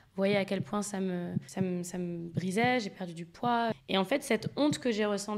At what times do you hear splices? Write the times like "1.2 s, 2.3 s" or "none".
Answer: 1.4 s, 3.8 s